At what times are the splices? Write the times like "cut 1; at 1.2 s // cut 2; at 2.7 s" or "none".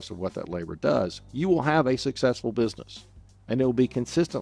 none